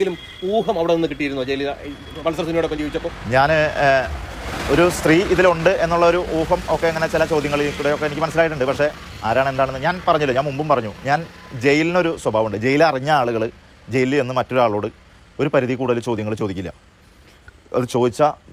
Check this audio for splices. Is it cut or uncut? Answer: uncut